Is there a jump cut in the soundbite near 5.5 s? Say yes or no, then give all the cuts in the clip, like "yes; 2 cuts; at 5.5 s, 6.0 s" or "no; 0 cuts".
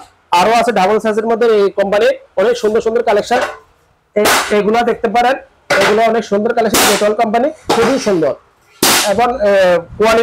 no; 1 cut; at 7.6 s